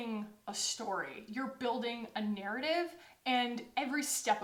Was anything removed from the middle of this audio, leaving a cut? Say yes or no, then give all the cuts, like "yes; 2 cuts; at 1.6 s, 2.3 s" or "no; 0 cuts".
no; 0 cuts